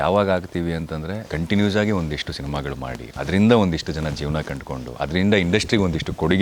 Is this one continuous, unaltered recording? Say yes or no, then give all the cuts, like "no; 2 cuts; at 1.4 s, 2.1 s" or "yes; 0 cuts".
no; 2 cuts; at 1.2 s, 3.0 s